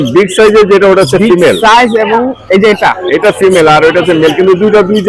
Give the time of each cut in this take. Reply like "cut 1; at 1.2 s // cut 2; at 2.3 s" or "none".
none